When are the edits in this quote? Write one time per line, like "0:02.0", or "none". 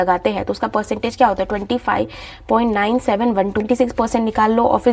0:03.6